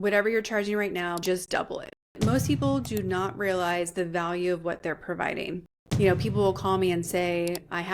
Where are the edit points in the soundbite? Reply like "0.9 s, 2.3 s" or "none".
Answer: 1.2 s, 2.2 s, 6.1 s